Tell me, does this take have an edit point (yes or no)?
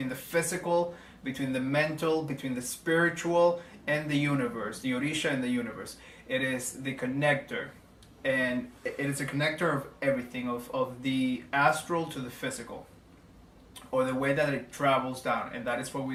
no